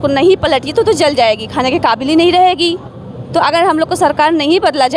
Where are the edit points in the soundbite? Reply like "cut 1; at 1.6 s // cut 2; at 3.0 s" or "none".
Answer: none